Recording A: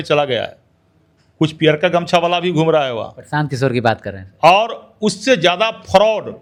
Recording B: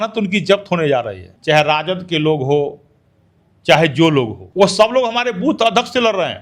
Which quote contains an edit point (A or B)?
B